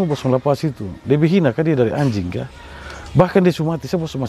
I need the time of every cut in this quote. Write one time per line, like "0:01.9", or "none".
none